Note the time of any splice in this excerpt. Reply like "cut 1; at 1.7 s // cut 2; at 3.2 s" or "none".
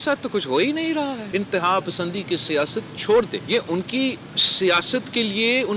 cut 1; at 1.2 s // cut 2; at 3.4 s